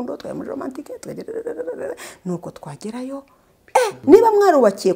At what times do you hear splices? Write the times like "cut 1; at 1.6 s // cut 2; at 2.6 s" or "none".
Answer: cut 1; at 4.0 s